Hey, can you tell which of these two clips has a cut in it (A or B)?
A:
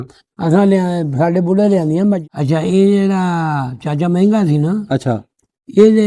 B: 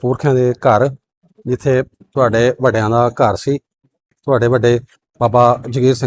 A